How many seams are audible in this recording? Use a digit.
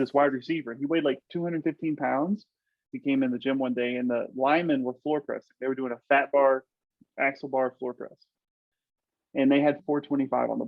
3